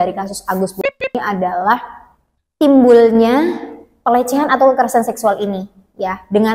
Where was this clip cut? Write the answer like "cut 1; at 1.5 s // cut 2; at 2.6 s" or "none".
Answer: none